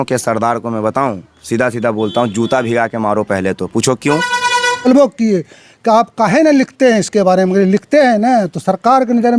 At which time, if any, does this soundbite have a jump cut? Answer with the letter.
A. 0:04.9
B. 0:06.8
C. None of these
A